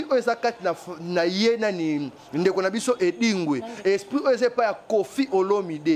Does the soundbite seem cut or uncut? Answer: uncut